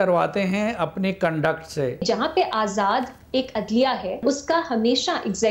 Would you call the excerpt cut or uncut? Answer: cut